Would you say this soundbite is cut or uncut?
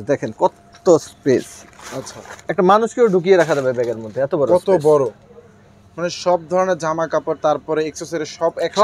uncut